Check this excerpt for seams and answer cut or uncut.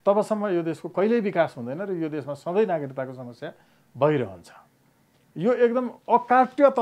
uncut